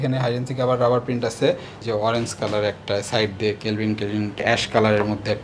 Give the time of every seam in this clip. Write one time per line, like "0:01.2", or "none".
0:01.7
0:04.4